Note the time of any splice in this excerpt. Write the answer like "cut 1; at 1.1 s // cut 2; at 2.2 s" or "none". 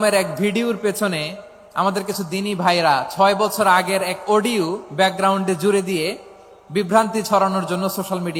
none